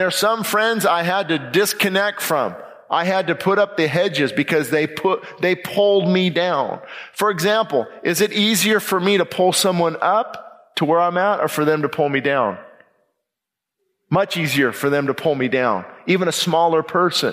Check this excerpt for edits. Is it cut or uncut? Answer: uncut